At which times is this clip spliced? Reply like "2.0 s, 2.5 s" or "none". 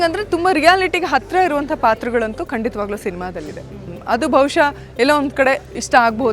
3.9 s